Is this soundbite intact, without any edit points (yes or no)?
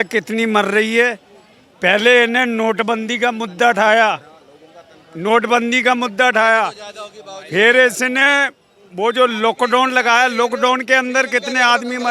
yes